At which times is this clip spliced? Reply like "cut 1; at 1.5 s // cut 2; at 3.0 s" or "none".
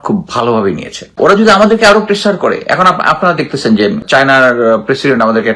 cut 1; at 1.2 s // cut 2; at 4.0 s